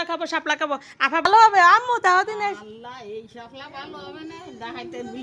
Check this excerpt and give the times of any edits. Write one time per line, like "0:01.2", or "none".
0:01.3